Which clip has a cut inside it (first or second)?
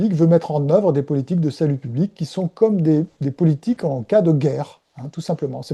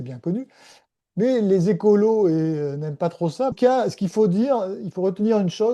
second